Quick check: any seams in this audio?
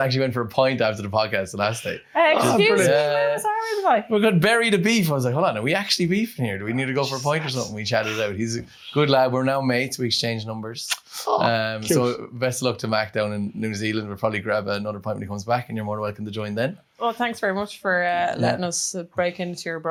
no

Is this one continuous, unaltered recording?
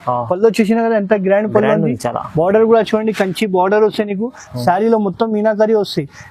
yes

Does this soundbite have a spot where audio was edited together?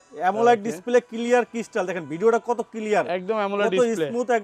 no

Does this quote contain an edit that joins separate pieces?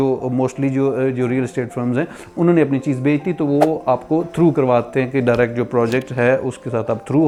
no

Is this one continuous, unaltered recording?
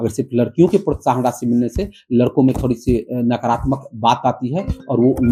yes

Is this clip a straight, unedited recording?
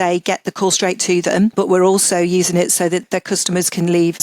no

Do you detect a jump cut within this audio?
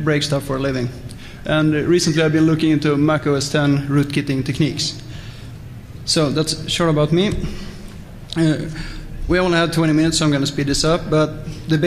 yes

